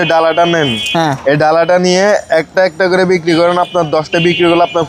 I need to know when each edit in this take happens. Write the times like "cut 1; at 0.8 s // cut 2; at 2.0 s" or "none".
none